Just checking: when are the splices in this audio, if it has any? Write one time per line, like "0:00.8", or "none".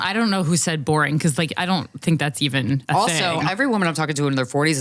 0:03.5

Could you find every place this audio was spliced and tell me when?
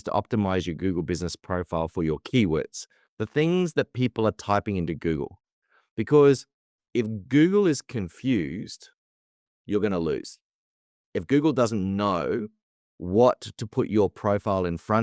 none

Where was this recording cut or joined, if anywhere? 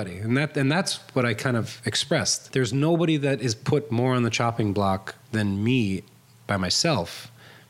0:02.4
0:05.2

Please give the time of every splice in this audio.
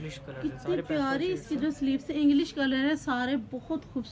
none

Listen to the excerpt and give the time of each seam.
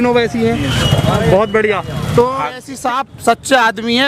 0:02.7

